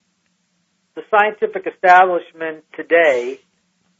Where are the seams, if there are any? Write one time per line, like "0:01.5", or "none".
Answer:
none